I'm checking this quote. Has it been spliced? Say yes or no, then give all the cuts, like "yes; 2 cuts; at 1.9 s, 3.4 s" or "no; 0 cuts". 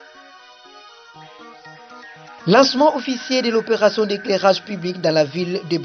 no; 0 cuts